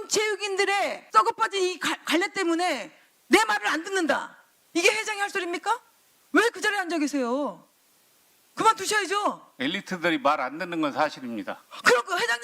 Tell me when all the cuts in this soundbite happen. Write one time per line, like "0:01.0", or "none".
0:01.0